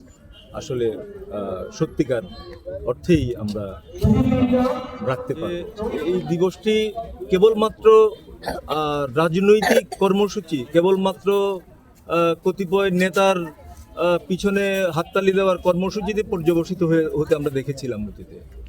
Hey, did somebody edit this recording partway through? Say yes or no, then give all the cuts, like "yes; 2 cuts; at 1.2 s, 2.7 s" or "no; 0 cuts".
yes; 1 cut; at 6.0 s